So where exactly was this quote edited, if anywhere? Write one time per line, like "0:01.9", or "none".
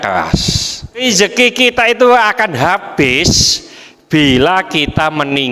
0:01.0